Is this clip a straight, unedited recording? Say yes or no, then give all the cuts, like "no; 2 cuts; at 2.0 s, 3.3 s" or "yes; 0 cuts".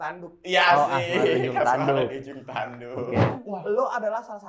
no; 1 cut; at 3.4 s